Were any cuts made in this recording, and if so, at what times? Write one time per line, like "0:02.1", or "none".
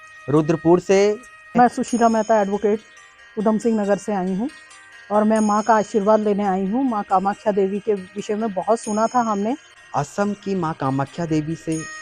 0:01.5
0:09.7

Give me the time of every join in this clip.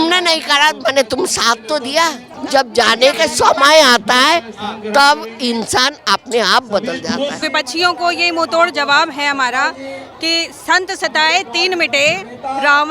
0:02.3
0:07.5

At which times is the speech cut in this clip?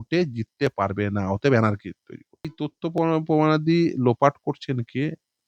0:02.5

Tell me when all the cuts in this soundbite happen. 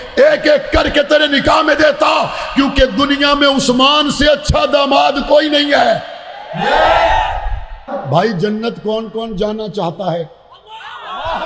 0:07.8

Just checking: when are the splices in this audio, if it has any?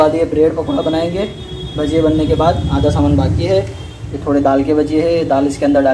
none

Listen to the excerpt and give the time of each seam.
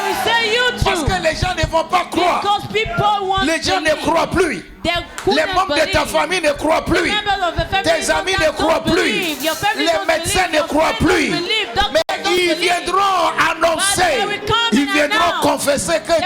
none

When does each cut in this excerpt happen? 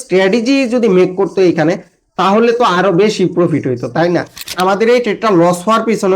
0:04.5

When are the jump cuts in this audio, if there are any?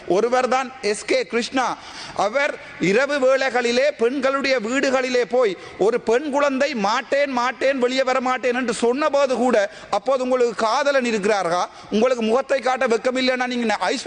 0:01.9

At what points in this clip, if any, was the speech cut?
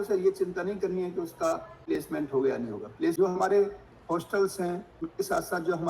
0:02.0
0:03.2
0:05.0

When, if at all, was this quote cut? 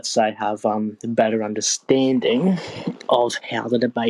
none

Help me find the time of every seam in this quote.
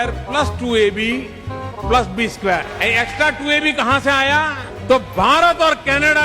0:02.7

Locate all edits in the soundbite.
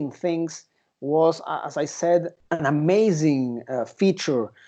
0:02.4

